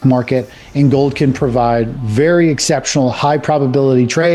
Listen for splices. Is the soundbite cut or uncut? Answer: uncut